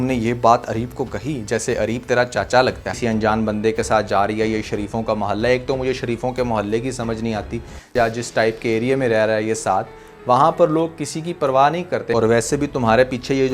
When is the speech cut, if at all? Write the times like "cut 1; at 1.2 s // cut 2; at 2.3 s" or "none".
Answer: cut 1; at 2.9 s // cut 2; at 7.8 s // cut 3; at 12.1 s